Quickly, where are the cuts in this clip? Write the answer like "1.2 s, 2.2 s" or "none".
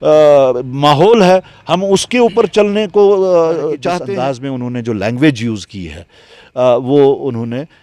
3.9 s